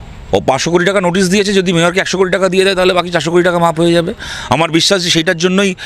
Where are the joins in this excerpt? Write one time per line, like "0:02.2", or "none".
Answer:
none

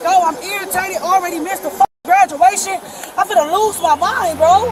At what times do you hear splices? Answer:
none

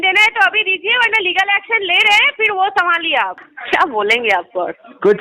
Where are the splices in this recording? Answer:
0:03.5

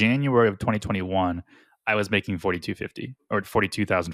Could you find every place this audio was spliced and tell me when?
none

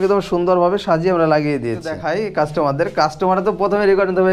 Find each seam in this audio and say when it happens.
0:02.0

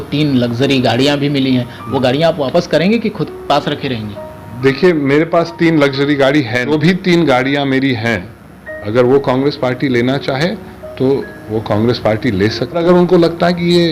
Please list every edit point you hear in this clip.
0:06.7
0:12.8

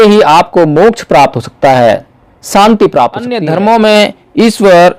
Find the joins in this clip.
0:03.4

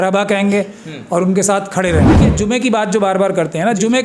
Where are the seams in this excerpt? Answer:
0:02.3

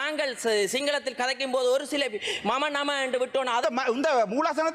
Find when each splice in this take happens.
0:03.6

